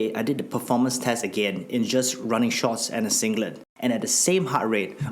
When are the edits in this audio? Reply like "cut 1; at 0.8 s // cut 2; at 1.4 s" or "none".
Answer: cut 1; at 3.6 s